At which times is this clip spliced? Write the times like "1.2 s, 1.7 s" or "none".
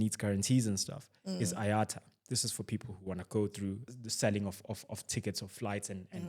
3.9 s